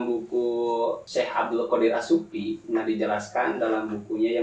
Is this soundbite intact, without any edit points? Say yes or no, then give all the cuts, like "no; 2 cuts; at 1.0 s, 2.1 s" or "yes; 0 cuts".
no; 1 cut; at 1.0 s